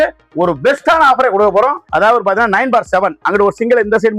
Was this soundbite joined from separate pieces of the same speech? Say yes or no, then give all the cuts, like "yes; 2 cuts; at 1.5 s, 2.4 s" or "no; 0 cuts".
yes; 1 cut; at 1.8 s